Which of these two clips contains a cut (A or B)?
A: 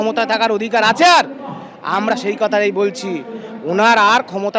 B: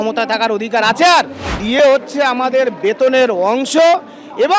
B